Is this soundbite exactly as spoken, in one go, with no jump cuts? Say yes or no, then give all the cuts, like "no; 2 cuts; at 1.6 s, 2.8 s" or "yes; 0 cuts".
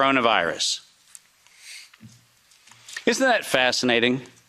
yes; 0 cuts